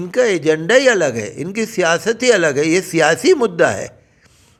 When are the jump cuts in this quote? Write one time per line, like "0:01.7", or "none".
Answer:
none